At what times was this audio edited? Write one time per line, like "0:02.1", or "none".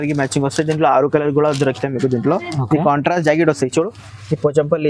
none